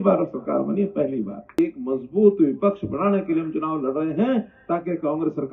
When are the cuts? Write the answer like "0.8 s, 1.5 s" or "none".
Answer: 1.6 s